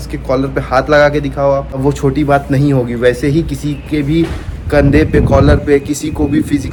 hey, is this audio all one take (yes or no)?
yes